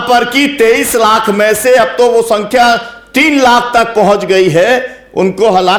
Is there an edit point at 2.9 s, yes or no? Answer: no